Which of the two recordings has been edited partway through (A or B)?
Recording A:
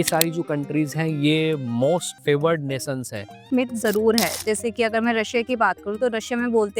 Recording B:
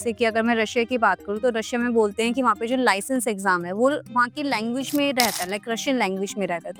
A